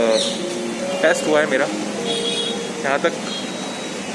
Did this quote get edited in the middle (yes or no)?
no